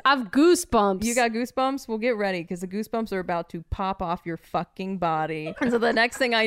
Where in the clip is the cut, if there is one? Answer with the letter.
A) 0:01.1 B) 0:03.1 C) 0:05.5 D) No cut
C